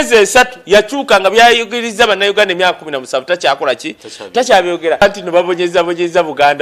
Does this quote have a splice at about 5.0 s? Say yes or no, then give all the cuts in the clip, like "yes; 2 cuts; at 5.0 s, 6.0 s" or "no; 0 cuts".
yes; 1 cut; at 5.0 s